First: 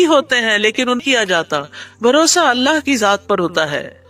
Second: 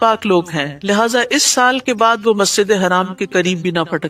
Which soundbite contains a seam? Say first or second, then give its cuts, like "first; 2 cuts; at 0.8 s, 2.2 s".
first; 1 cut; at 1.0 s